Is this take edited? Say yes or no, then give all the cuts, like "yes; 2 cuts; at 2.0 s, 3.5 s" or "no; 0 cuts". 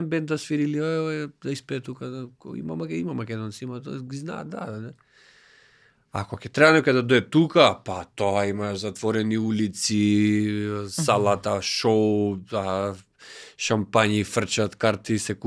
no; 0 cuts